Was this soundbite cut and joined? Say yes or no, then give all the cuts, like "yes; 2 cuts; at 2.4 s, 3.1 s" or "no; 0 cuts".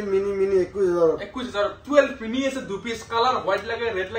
no; 0 cuts